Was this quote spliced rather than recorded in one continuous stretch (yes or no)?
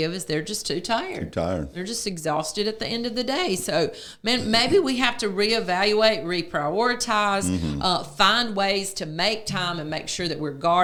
no